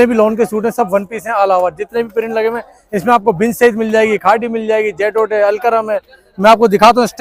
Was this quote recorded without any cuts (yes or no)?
yes